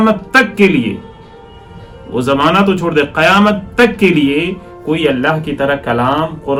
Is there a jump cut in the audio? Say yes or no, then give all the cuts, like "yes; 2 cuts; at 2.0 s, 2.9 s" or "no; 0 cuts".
no; 0 cuts